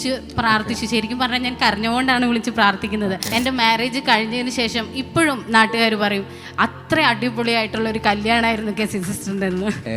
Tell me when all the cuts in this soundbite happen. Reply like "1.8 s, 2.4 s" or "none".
3.3 s